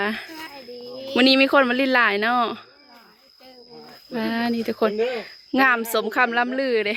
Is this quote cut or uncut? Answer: uncut